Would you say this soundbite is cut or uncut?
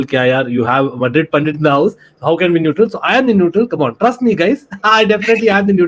uncut